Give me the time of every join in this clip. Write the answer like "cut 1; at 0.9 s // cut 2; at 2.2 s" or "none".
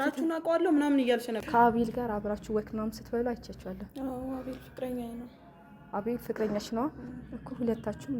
cut 1; at 1.4 s